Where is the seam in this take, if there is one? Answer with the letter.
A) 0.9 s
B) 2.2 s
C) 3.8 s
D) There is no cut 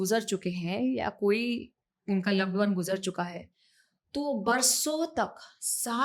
D